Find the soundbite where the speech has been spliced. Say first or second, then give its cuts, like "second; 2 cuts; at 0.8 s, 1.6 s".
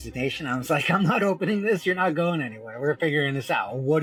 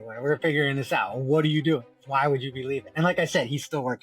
second; 1 cut; at 2.9 s